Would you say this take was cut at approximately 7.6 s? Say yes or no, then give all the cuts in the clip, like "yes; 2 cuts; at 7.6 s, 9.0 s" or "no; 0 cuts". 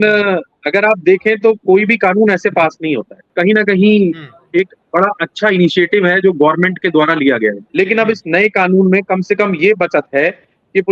yes; 2 cuts; at 3.2 s, 7.6 s